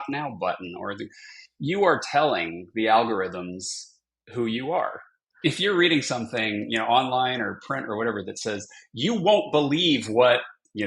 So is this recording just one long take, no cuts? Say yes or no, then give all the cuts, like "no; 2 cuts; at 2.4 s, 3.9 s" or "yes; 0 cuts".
no; 1 cut; at 5.2 s